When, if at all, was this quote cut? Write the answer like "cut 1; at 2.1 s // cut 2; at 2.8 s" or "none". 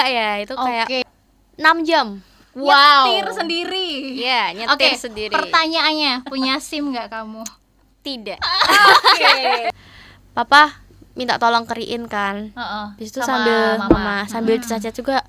cut 1; at 1.0 s // cut 2; at 9.7 s